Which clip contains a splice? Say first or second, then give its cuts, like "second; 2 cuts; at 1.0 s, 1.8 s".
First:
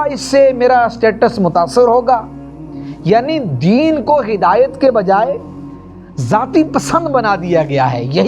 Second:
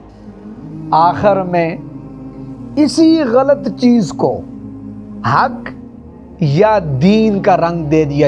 second; 1 cut; at 0.9 s